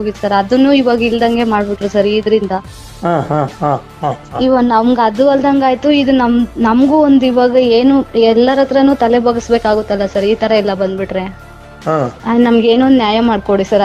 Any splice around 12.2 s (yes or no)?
yes